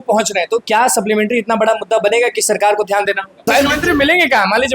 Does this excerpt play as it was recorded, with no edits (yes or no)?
no